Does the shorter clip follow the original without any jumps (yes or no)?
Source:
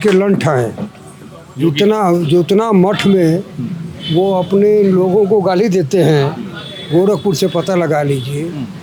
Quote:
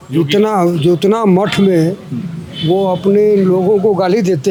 yes